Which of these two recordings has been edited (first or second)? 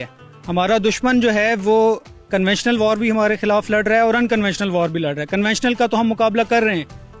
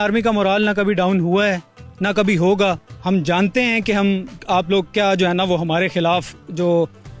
second